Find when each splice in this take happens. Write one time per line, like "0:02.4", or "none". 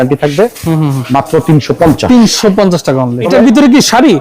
0:03.2